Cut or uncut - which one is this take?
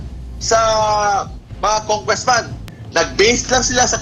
uncut